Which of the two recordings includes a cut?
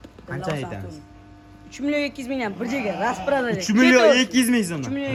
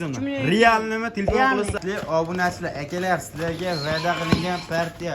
second; 1 cut; at 1.8 s

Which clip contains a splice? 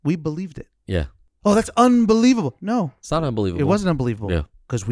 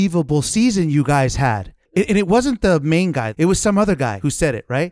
second; 3 cuts; at 1.7 s, 3.3 s, 4.2 s

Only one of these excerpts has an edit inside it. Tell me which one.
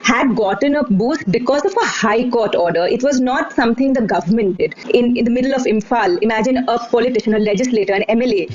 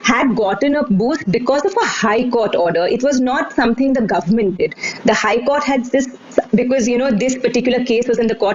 first; 1 cut; at 4.8 s

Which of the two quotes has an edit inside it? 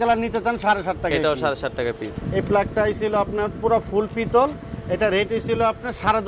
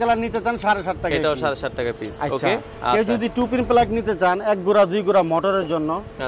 first; 1 cut; at 2.1 s

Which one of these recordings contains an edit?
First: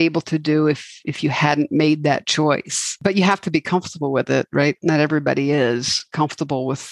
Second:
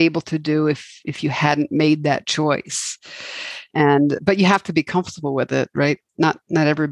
first; 2 cuts; at 3.0 s, 4.8 s

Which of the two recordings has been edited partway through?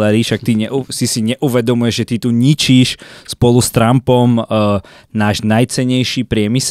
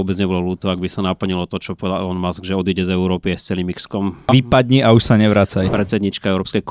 second; 2 cuts; at 4.3 s, 5.7 s

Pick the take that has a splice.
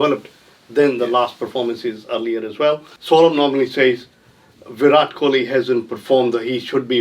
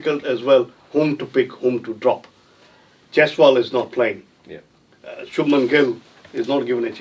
first; 1 cut; at 2.9 s

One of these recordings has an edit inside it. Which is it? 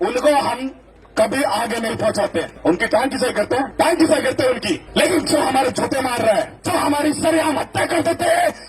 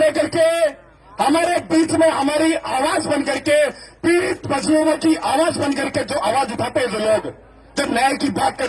first; 4 cuts; at 2.5 s, 3.7 s, 4.8 s, 6.6 s

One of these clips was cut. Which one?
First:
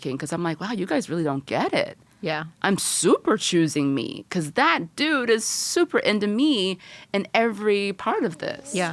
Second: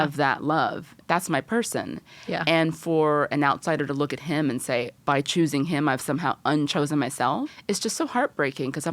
second; 3 cuts; at 0.9 s, 4.9 s, 7.6 s

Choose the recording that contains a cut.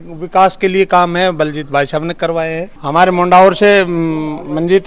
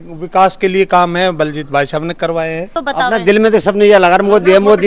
second; 1 cut; at 2.7 s

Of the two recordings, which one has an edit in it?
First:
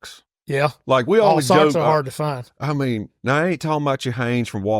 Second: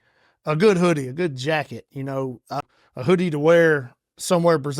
second; 1 cut; at 2.7 s

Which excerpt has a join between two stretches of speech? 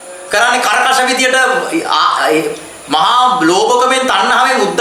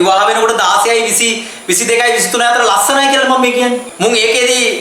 second; 1 cut; at 3.9 s

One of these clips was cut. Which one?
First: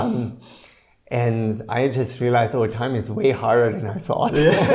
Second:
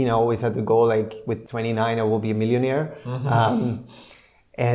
second; 1 cut; at 1.4 s

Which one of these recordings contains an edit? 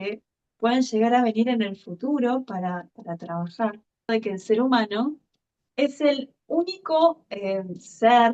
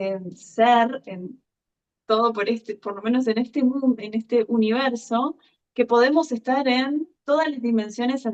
first; 1 cut; at 4.1 s

